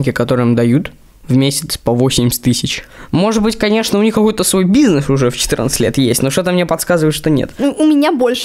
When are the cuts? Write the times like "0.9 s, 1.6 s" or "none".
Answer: 2.9 s, 7.5 s